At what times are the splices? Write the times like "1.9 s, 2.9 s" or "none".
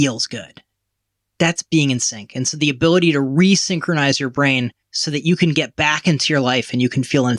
0.9 s, 4.9 s